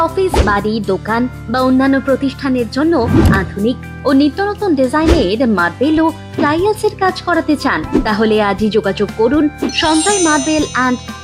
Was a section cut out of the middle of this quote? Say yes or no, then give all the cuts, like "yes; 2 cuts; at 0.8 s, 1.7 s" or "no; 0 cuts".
no; 0 cuts